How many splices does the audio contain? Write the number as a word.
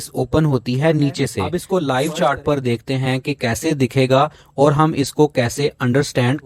one